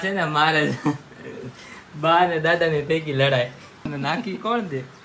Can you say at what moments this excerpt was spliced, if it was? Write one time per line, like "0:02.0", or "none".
0:03.9